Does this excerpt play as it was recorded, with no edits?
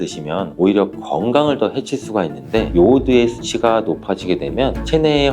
no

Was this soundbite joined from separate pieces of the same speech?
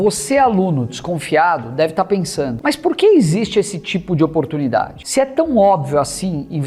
yes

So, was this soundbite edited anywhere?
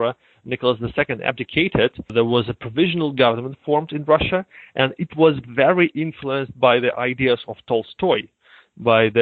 no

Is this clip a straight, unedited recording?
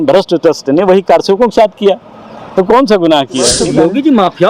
no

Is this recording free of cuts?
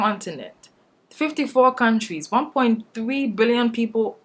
yes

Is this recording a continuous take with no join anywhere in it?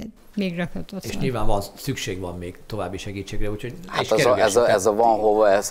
yes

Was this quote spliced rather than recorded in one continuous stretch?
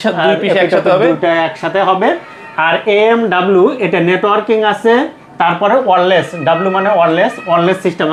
no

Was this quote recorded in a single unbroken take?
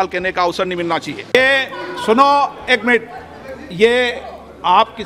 no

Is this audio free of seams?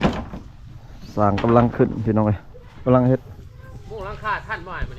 yes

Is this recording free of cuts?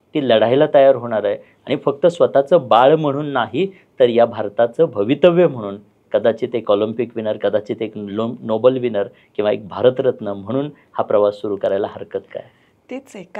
yes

